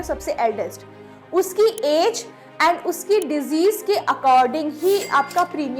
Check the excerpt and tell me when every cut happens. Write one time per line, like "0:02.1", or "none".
none

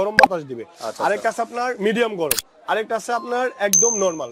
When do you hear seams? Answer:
none

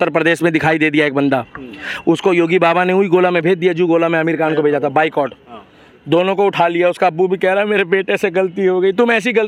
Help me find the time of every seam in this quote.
none

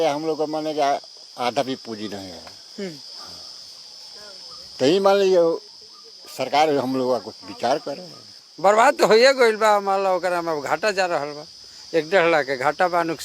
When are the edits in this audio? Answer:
0:08.4

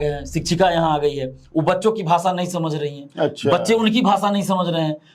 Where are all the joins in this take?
none

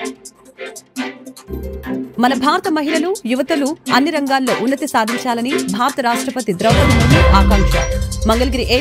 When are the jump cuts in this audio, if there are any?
0:01.3

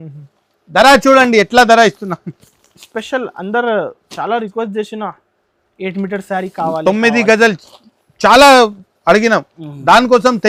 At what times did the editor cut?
none

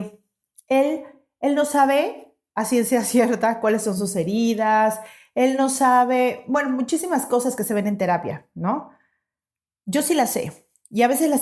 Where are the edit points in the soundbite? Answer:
none

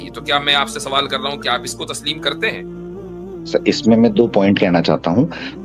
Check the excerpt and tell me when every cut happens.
none

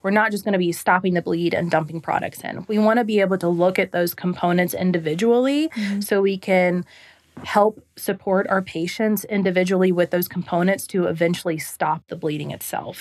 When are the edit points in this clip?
0:12.0

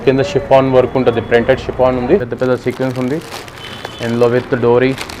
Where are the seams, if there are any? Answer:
0:02.3

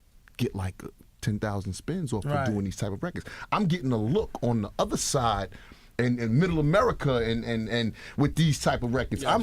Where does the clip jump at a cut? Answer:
0:06.9

